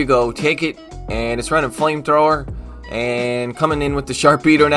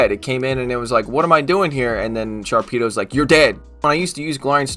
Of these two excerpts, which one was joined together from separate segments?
second; 1 cut; at 3.8 s

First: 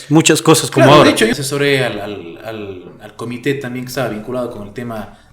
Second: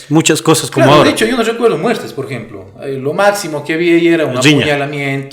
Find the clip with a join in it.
first; 1 cut; at 1.3 s

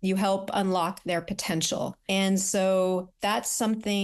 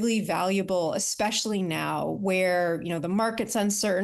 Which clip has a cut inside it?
first; 2 cuts; at 2.0 s, 3.1 s

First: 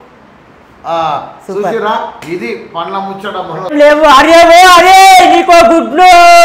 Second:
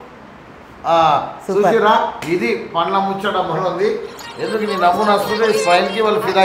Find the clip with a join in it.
first; 1 cut; at 3.7 s

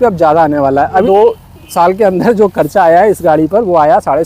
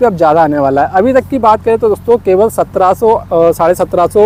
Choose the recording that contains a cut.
first; 1 cut; at 1.0 s

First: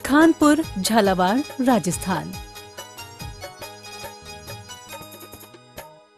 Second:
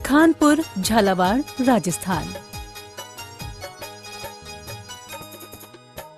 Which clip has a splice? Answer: first; 1 cut; at 2.3 s

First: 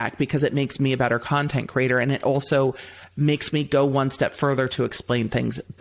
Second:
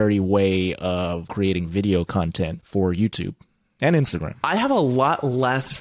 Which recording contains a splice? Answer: second; 3 cuts; at 1.3 s, 2.6 s, 4.3 s

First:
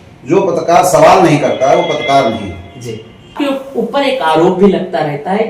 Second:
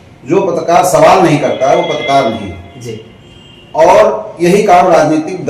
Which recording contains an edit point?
first; 1 cut; at 3.4 s

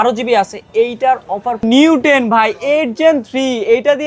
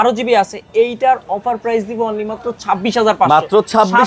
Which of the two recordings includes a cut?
first; 1 cut; at 1.6 s

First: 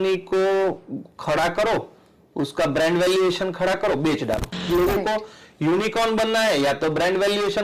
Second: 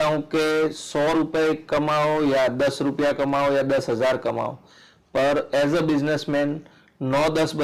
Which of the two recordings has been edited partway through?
first; 1 cut; at 4.6 s

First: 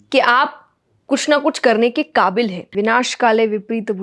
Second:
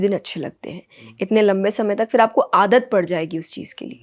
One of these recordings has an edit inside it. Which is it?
first; 1 cut; at 2.7 s

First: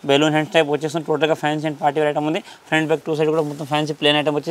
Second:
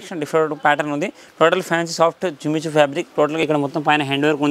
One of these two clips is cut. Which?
second; 1 cut; at 3.4 s

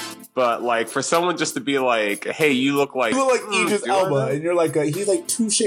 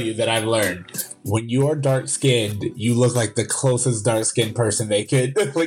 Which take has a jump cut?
first; 1 cut; at 3.1 s

